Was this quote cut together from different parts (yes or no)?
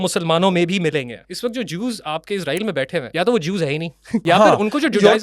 yes